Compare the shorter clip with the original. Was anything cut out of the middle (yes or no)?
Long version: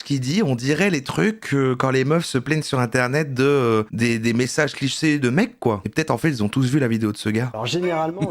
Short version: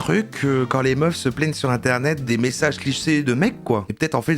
yes